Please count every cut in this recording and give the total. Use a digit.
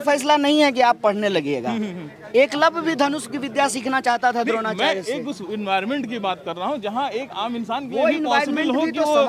0